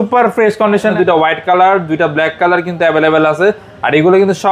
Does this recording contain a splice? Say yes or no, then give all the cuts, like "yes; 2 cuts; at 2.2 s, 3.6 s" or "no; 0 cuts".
yes; 1 cut; at 0.9 s